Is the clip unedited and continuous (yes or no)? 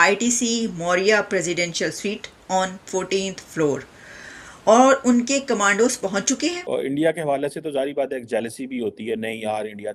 no